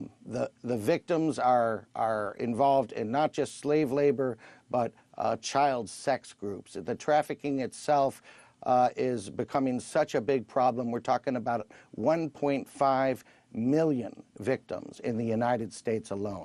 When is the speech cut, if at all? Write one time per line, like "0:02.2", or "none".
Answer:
none